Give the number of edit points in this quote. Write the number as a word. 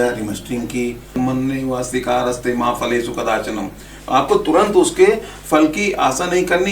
one